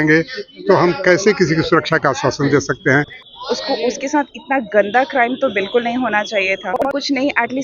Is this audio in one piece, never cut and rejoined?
no; 2 cuts; at 3.2 s, 6.9 s

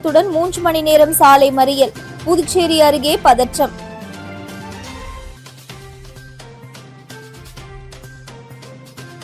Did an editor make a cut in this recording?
no; 0 cuts

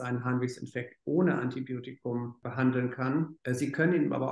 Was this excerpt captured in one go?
no; 2 cuts; at 2.4 s, 3.4 s

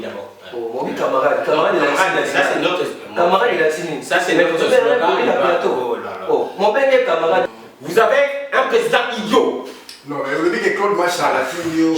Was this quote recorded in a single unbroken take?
no; 1 cut; at 7.4 s

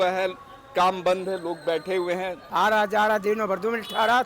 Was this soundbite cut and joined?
yes; 1 cut; at 1.8 s

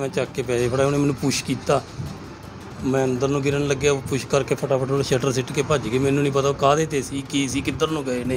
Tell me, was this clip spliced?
no; 0 cuts

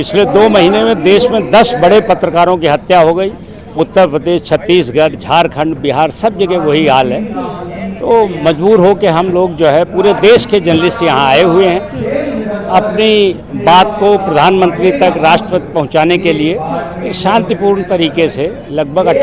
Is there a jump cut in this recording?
no; 0 cuts

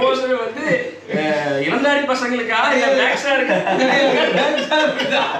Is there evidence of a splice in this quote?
no; 0 cuts

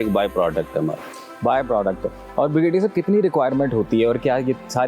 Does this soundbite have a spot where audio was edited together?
no; 0 cuts

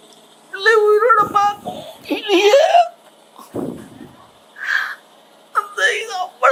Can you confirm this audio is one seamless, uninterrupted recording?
yes; 0 cuts

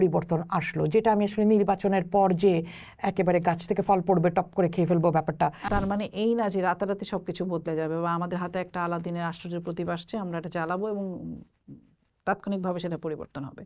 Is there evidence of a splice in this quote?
yes; 1 cut; at 5.6 s

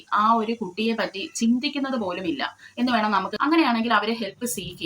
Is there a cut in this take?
yes; 1 cut; at 3.3 s

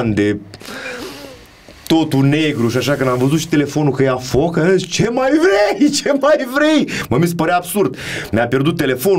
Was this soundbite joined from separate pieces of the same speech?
no; 0 cuts

